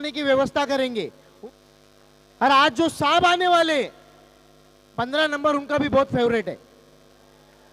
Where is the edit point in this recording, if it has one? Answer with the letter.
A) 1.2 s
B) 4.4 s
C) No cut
A